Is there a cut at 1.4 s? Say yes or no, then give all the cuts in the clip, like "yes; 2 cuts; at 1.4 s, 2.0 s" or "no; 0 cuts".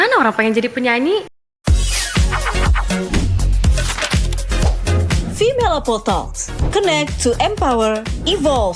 yes; 1 cut; at 1.4 s